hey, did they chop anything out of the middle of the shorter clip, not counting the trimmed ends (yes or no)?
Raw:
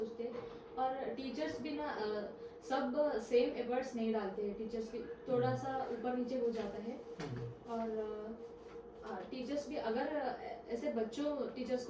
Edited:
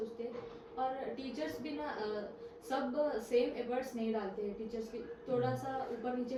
no